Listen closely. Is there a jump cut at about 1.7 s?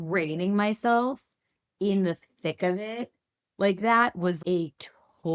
no; 1 cut; at 4.4 s

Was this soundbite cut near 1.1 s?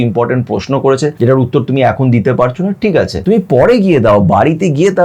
yes; 2 cuts; at 1.1 s, 3.2 s

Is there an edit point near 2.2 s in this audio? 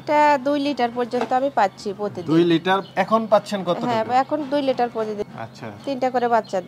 no; 1 cut; at 5.2 s

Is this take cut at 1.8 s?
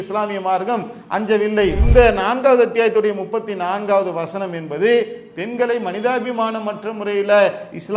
yes; 1 cut; at 1.8 s

